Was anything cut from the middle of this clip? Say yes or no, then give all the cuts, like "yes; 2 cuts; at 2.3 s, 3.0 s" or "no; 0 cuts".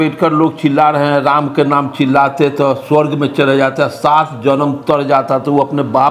no; 0 cuts